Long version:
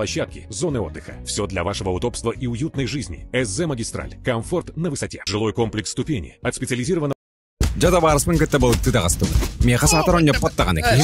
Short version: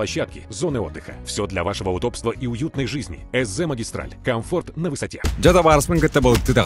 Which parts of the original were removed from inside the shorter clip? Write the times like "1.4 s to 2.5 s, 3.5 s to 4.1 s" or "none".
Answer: 5.2 s to 7.5 s